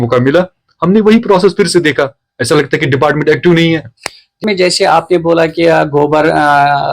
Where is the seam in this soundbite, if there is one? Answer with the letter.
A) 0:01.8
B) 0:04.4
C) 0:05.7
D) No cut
B